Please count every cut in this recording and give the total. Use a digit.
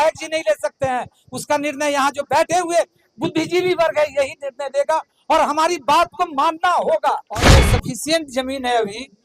1